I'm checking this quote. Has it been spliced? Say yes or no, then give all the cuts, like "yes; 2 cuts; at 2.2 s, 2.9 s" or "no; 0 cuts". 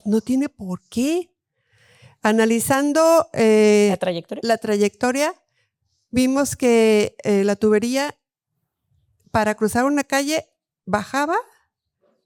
no; 0 cuts